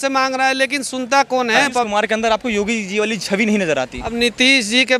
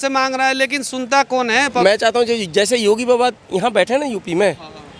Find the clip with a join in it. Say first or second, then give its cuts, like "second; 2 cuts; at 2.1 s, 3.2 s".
second; 1 cut; at 1.8 s